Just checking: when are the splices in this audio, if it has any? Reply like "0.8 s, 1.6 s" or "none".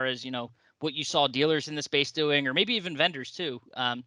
none